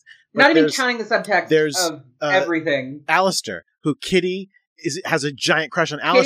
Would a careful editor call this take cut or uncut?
uncut